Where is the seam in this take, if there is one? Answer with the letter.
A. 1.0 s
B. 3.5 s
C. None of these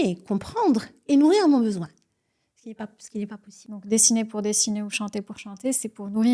B